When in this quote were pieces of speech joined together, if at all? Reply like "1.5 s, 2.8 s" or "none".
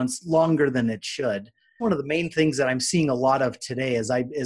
1.8 s